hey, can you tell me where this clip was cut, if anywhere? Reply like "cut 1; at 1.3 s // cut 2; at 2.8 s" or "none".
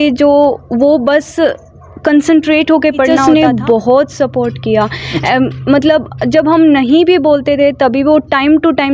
cut 1; at 3.2 s